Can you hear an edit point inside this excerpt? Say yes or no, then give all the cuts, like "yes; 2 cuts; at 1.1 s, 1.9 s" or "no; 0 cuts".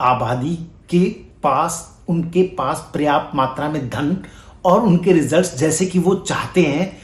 no; 0 cuts